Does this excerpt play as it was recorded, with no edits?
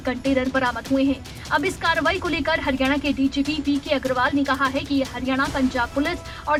yes; 0 cuts

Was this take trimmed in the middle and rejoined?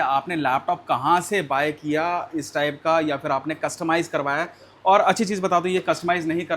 no; 0 cuts

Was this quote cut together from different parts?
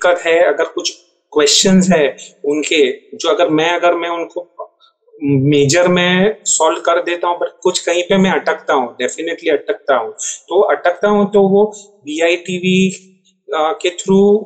no; 0 cuts

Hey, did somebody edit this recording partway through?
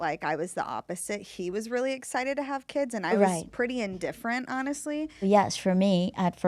yes; 1 cut; at 5.2 s

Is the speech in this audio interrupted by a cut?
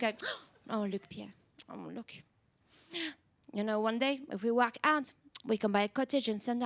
no; 0 cuts

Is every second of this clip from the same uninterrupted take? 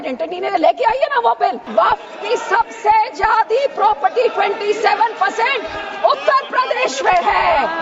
no; 1 cut; at 1.7 s

